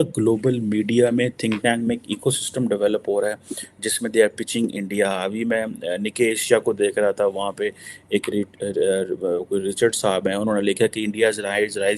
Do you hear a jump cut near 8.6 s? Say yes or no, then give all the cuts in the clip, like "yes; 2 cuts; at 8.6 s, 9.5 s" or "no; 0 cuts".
no; 0 cuts